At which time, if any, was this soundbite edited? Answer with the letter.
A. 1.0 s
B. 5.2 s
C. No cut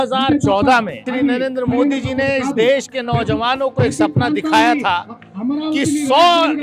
A